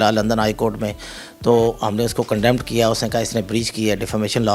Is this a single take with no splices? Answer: yes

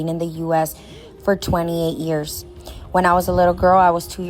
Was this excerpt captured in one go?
yes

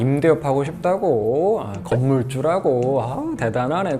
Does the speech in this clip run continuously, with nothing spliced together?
yes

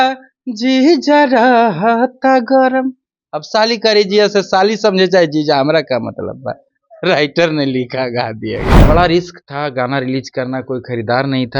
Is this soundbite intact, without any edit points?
no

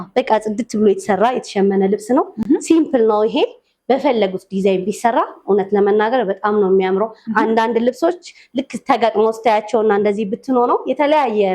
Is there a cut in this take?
no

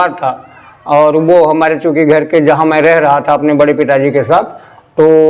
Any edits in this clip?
no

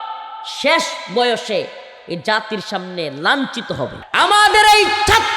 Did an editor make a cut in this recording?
yes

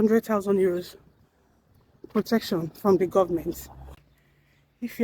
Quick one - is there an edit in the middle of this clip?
yes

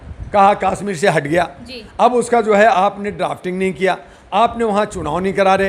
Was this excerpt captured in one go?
yes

